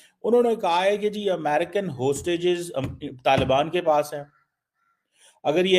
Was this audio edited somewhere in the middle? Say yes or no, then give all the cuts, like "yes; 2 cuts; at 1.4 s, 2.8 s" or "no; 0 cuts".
no; 0 cuts